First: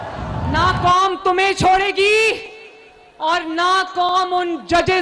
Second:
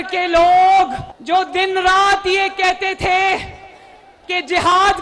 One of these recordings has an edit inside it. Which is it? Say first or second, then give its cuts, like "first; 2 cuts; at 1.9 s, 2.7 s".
second; 1 cut; at 1.1 s